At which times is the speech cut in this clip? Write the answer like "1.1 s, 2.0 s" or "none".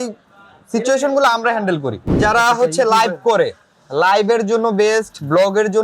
2.1 s

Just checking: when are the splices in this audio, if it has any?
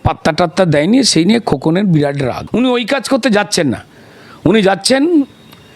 2.4 s

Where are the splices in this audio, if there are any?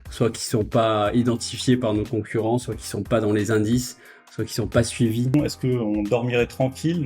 5.3 s

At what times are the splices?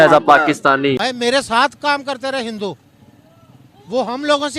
1.0 s

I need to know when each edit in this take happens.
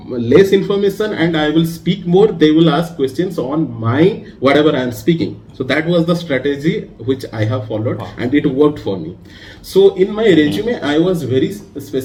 none

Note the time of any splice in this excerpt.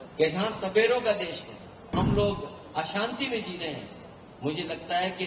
1.9 s

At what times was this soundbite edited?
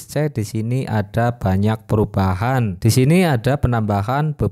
2.7 s

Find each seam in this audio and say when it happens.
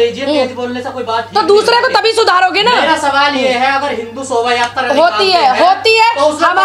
none

